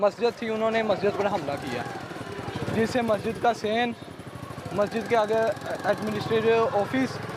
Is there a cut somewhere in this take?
no; 0 cuts

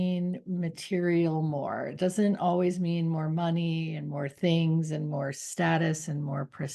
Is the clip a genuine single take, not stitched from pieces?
yes; 0 cuts

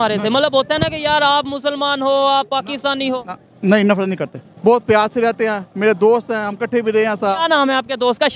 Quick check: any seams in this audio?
no; 0 cuts

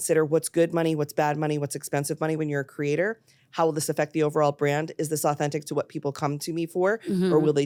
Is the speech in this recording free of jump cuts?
yes; 0 cuts

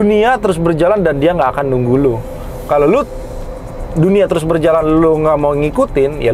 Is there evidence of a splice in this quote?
no; 0 cuts

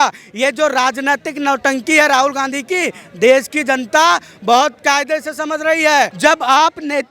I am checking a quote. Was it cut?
yes; 1 cut; at 6.1 s

